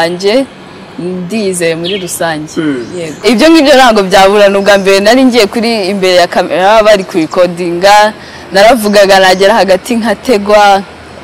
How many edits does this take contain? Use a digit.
1